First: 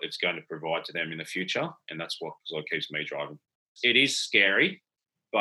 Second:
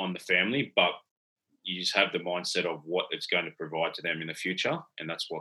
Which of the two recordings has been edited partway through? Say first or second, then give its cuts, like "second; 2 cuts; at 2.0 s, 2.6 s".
first; 1 cut; at 3.7 s